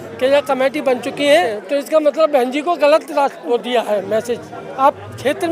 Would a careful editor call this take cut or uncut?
cut